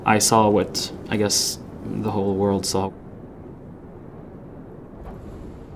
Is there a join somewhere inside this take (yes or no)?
yes